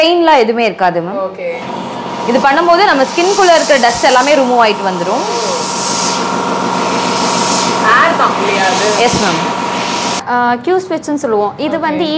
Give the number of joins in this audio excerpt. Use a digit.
1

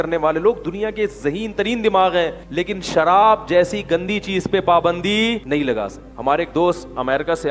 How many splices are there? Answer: 2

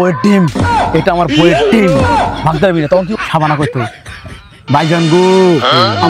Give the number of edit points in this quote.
1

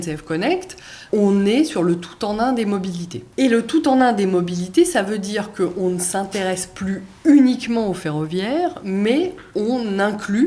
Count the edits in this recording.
2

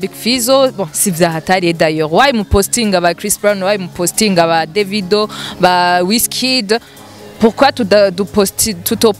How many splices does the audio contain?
0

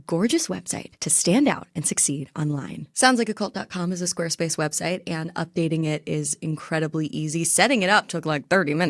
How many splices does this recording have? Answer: 1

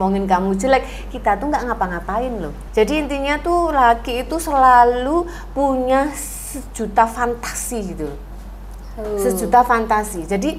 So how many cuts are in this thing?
1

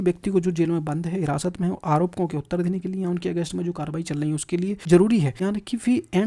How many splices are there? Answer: 2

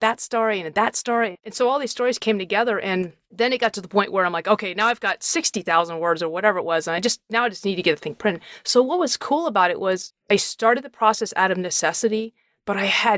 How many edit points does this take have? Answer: 2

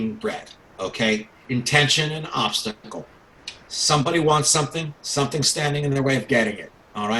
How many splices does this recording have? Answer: 1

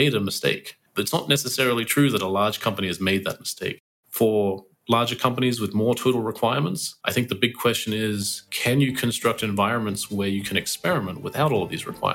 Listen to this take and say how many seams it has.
1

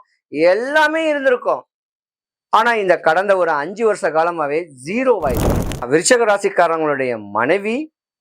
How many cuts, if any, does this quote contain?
1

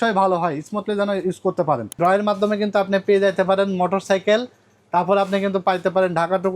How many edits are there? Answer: 1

